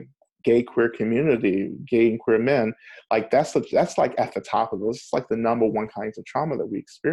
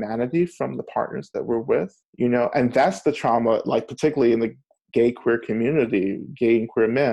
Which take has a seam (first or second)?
second